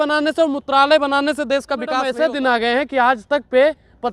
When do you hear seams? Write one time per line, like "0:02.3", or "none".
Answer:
0:02.1